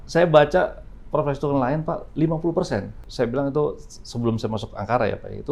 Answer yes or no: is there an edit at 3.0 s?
yes